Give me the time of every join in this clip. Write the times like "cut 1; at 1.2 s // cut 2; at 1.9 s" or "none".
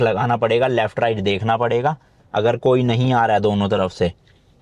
none